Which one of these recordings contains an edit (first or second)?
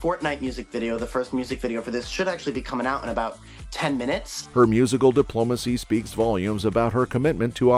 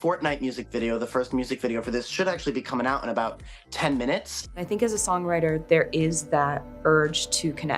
second